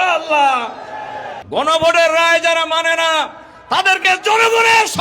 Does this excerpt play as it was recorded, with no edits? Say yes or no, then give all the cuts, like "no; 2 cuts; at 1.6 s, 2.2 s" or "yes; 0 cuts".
no; 1 cut; at 1.3 s